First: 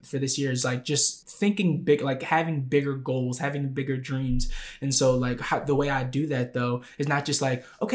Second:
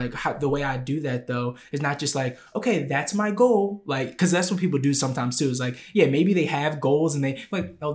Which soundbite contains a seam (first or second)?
first